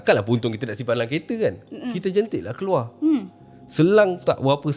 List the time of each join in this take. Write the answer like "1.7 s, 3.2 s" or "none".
none